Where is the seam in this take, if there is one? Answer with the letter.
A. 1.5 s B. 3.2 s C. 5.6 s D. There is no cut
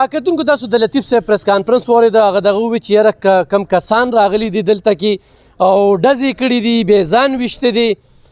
D